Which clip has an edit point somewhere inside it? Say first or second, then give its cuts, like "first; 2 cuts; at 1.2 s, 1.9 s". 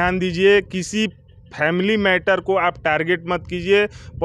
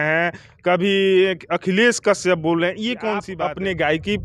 second; 1 cut; at 3.3 s